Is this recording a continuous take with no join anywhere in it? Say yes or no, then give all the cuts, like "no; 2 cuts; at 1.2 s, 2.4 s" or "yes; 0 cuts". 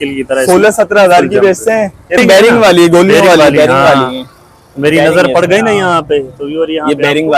no; 1 cut; at 2.2 s